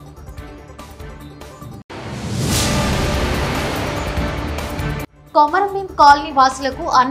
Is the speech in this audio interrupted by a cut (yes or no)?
no